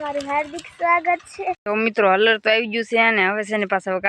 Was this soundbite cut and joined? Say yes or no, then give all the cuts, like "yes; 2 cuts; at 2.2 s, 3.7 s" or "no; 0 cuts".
yes; 1 cut; at 1.6 s